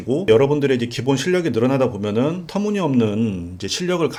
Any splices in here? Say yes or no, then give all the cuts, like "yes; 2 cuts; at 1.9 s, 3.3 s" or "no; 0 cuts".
no; 0 cuts